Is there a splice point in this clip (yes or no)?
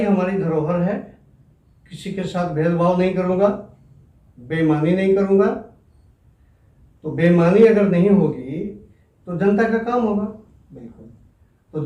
no